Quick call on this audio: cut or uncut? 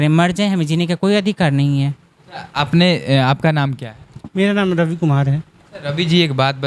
uncut